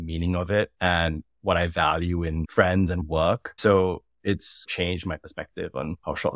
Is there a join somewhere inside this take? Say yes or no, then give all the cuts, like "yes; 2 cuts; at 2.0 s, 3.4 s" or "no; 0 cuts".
yes; 2 cuts; at 3.0 s, 4.7 s